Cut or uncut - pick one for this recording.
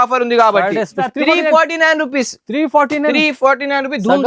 cut